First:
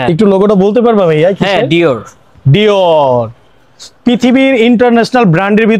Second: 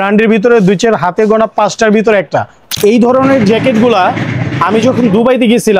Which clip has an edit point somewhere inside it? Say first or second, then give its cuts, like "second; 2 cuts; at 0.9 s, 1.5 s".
second; 1 cut; at 2.6 s